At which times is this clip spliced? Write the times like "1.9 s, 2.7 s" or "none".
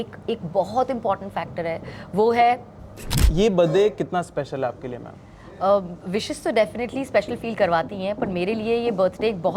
3.2 s